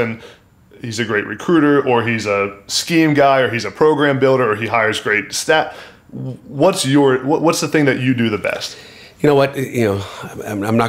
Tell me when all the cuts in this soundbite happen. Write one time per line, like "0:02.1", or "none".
none